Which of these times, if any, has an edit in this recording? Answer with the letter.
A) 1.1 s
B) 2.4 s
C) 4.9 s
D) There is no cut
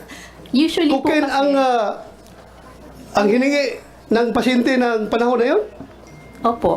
D